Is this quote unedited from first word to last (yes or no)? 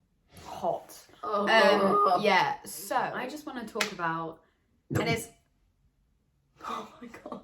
no